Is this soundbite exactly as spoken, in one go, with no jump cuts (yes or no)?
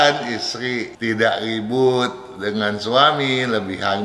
no